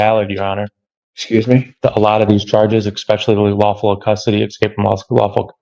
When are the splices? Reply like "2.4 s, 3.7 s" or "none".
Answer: none